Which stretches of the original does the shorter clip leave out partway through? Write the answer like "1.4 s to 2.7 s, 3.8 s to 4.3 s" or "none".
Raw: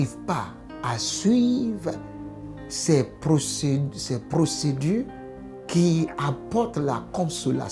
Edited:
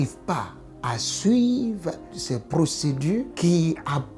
2.2 s to 3.9 s, 5.1 s to 5.6 s